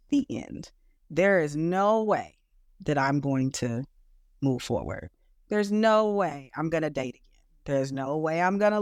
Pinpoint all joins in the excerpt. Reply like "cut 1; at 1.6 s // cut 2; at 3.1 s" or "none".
none